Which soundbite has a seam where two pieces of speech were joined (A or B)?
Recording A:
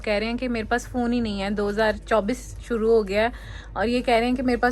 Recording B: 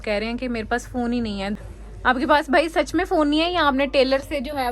B